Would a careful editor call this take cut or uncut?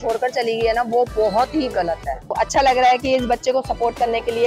cut